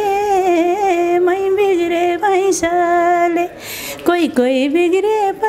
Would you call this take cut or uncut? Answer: uncut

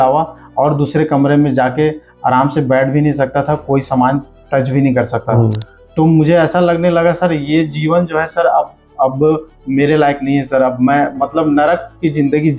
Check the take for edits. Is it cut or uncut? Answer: uncut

